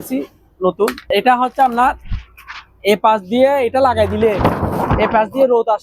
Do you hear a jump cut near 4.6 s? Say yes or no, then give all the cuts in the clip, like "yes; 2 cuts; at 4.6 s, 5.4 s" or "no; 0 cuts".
no; 1 cut; at 1.0 s